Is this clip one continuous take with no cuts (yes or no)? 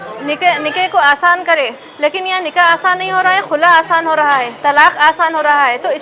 yes